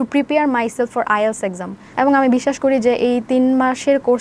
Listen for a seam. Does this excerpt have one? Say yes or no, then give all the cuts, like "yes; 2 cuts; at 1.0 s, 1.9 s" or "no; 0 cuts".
yes; 1 cut; at 1.9 s